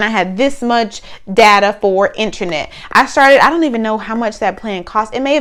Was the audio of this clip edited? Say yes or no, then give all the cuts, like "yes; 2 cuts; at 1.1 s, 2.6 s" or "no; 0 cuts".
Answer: no; 0 cuts